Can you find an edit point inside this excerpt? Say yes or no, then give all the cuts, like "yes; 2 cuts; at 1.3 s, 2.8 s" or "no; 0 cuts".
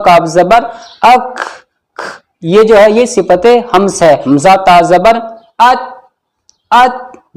yes; 1 cut; at 4.2 s